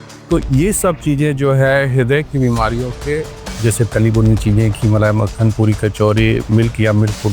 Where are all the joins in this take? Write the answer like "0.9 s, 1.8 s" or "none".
3.5 s